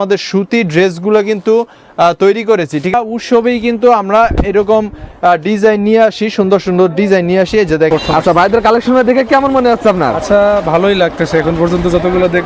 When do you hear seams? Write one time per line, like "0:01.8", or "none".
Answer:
0:02.9
0:07.9